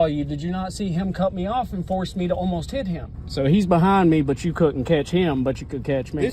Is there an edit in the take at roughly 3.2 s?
yes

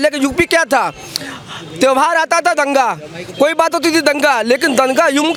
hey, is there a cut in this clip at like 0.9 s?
no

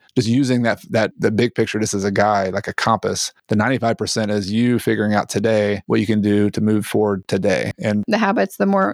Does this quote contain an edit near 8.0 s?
yes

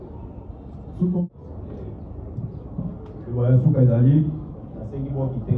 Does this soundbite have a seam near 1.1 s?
yes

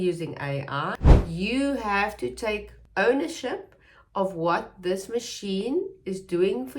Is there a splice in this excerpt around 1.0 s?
yes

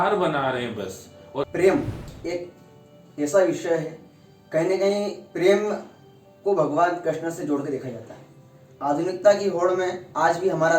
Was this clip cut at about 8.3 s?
no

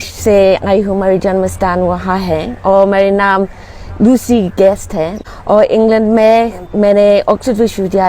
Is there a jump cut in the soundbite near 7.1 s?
no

